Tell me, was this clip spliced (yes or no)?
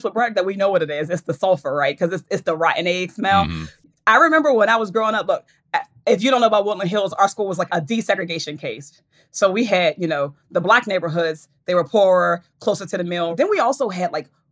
yes